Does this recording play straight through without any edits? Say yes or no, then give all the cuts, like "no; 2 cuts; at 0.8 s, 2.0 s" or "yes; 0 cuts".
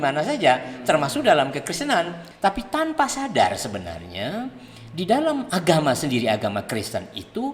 no; 1 cut; at 2.2 s